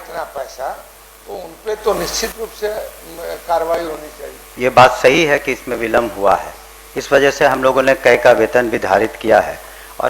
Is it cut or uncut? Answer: cut